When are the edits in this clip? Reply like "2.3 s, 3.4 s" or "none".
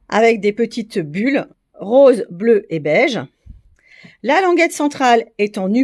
1.6 s